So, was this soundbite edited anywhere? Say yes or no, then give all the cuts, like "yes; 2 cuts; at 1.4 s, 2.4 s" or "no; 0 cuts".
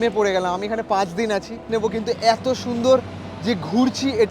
yes; 1 cut; at 1.6 s